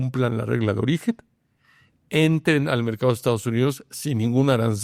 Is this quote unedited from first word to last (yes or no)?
yes